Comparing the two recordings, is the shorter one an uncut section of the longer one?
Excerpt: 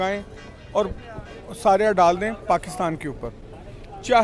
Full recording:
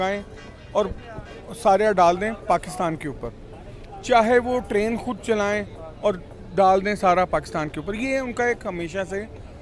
yes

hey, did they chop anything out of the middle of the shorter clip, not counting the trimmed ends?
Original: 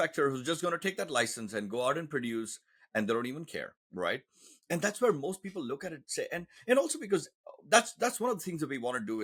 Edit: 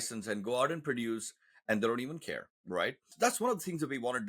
yes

